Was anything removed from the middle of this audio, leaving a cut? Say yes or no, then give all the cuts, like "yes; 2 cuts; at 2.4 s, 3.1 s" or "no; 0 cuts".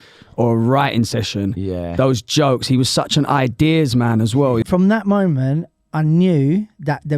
yes; 1 cut; at 4.6 s